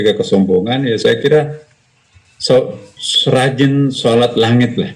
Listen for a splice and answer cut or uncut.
uncut